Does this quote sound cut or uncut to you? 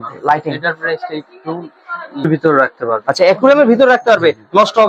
cut